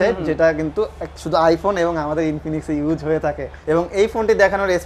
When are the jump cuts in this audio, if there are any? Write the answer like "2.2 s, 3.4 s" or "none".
3.5 s